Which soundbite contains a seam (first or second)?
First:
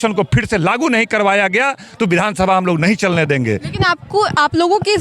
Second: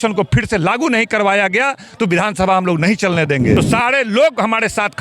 second